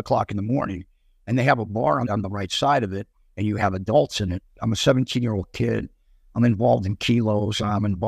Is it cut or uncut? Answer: cut